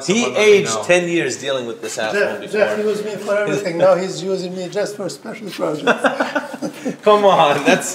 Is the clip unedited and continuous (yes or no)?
yes